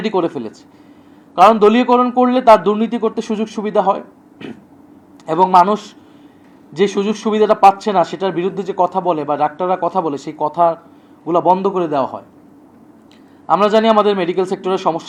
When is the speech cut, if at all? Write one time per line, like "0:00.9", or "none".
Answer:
none